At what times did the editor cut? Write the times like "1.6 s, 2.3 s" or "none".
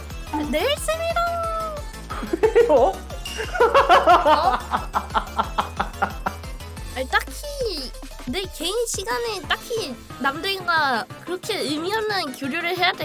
6.6 s